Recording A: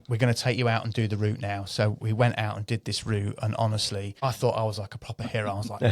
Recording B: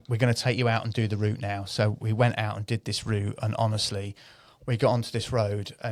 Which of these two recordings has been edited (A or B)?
A